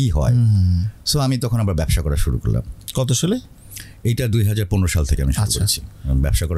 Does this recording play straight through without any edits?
yes; 0 cuts

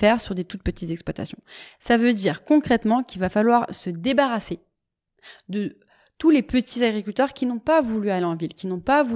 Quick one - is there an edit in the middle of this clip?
no; 0 cuts

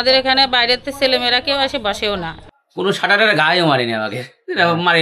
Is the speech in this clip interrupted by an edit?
yes; 1 cut; at 2.3 s

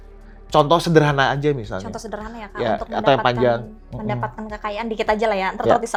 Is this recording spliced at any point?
no; 0 cuts

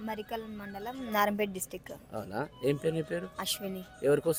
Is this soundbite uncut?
yes; 0 cuts

